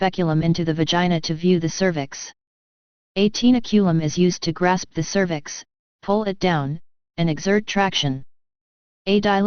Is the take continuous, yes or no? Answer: no